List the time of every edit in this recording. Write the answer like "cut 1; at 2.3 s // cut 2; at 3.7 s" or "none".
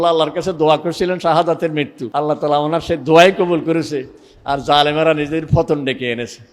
cut 1; at 2.0 s